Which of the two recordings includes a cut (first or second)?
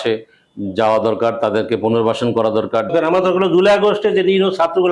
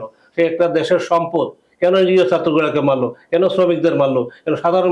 first